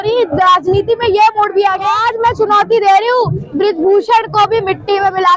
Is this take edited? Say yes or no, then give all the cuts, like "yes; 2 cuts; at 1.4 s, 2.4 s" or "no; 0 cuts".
yes; 1 cut; at 2.0 s